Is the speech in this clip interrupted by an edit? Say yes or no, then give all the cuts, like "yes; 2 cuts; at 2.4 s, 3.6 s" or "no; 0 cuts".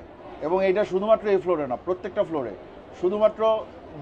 no; 0 cuts